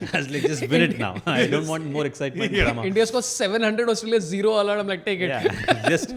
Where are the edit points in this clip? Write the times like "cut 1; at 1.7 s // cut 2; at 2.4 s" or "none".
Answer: none